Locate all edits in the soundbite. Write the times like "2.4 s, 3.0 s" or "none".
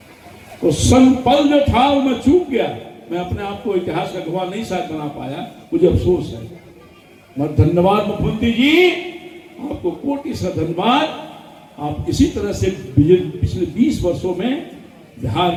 none

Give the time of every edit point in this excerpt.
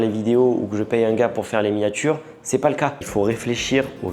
3.0 s

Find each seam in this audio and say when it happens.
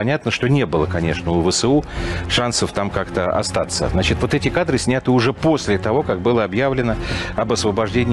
none

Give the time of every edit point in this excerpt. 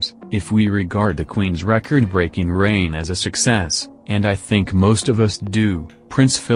none

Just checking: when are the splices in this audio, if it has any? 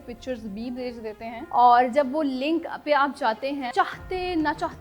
1.4 s, 3.7 s

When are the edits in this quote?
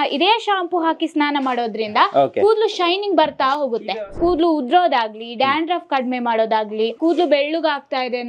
3.9 s, 7.0 s

